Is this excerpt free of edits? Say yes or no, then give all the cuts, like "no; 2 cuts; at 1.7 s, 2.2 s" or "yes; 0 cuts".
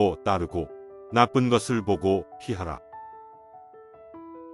no; 1 cut; at 3.5 s